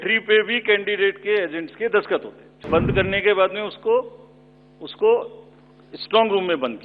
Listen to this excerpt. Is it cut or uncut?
cut